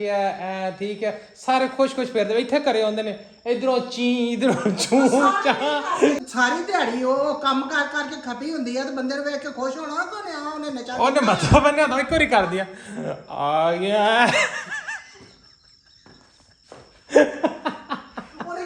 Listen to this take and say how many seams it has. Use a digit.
1